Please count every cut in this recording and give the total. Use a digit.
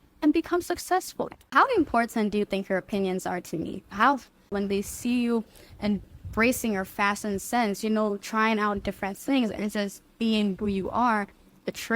2